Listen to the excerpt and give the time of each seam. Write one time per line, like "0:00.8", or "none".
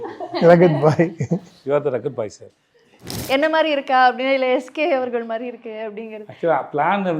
0:03.1